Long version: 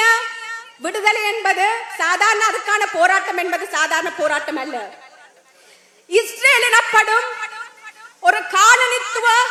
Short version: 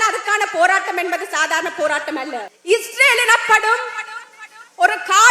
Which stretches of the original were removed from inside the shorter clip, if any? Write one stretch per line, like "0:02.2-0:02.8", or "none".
0:04.9-0:06.0

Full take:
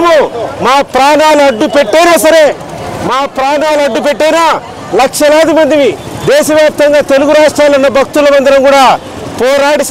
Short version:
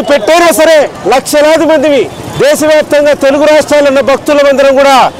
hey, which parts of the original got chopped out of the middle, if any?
0:02.6-0:04.8

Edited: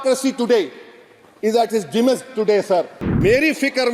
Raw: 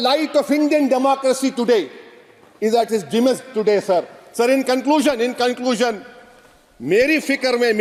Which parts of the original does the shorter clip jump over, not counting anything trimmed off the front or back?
0:04.2-0:06.7

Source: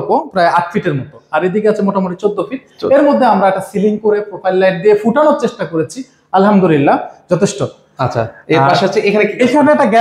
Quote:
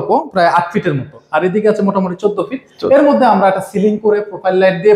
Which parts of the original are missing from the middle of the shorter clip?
none

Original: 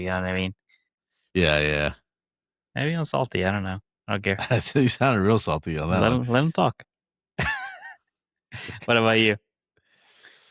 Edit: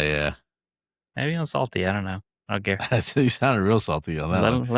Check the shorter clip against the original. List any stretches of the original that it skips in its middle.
none

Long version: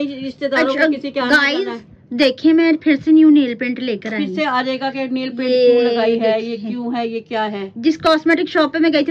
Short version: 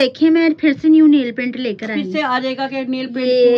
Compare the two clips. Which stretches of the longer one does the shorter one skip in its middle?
none

